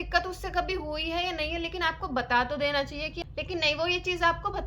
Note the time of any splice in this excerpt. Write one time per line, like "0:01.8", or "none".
0:03.1